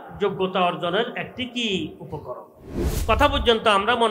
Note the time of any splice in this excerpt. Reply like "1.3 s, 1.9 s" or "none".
2.9 s